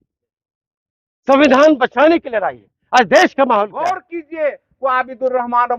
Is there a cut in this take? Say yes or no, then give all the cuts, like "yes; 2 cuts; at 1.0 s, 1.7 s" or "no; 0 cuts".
yes; 1 cut; at 4.1 s